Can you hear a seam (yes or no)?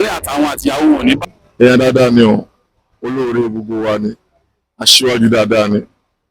yes